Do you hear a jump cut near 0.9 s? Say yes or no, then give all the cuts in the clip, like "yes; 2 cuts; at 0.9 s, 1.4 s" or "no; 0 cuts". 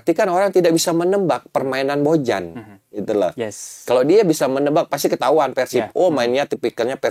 no; 0 cuts